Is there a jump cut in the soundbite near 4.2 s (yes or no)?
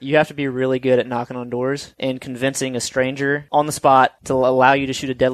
yes